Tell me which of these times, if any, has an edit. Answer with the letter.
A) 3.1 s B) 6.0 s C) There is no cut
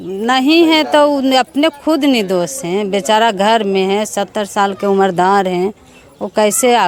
C